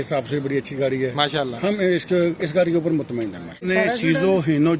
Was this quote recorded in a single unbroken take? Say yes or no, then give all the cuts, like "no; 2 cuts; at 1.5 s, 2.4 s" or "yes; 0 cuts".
no; 1 cut; at 3.6 s